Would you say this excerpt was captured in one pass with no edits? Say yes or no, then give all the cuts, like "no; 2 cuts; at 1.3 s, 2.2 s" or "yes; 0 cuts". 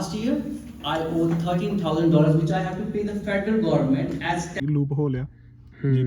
no; 1 cut; at 4.6 s